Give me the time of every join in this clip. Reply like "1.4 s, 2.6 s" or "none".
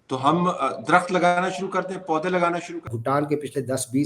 2.9 s